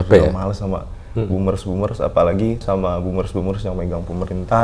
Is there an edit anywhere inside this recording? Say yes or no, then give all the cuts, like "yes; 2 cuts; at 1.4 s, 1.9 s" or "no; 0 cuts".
yes; 1 cut; at 2.6 s